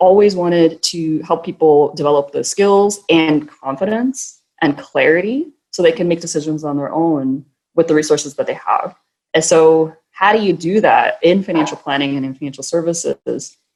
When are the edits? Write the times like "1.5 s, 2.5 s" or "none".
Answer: none